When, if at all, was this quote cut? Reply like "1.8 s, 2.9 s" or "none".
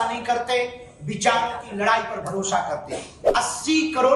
3.2 s